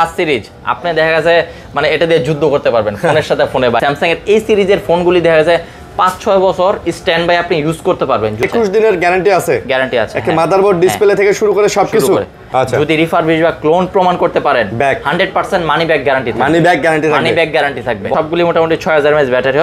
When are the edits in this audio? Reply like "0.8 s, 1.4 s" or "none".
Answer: 3.8 s, 8.4 s, 12.4 s, 18.1 s